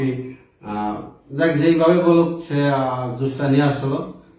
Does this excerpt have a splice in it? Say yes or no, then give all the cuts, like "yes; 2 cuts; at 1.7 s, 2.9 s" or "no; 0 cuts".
no; 0 cuts